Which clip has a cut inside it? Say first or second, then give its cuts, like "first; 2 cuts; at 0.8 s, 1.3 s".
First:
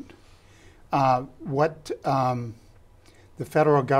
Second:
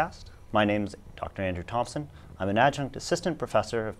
first; 1 cut; at 2.6 s